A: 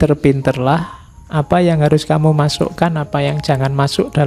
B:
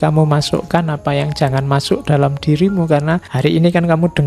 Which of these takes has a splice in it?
B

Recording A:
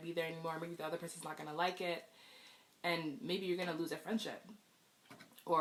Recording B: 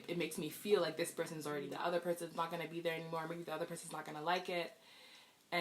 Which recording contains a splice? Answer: B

